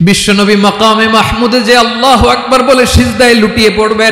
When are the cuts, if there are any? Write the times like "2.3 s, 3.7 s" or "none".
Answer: none